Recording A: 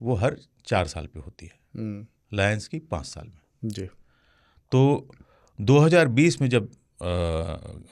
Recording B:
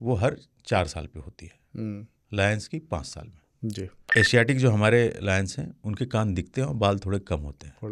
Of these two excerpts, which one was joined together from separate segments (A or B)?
B